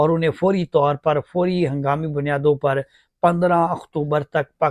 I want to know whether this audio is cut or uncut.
uncut